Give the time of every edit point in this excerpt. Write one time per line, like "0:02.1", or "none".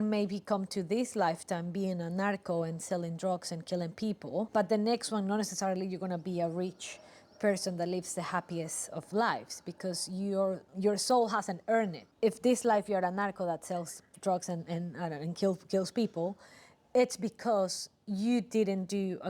0:04.5
0:10.7
0:12.0

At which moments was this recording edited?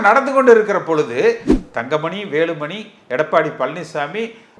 0:01.5

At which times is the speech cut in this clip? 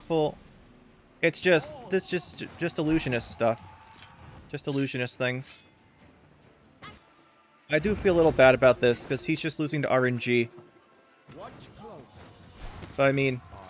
0:07.0

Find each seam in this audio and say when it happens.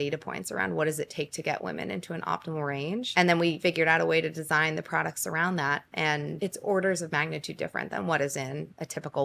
0:03.1
0:03.6
0:06.3

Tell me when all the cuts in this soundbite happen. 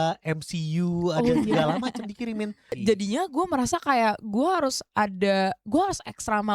0:02.8

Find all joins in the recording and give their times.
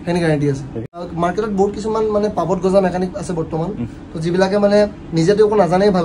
0:00.9

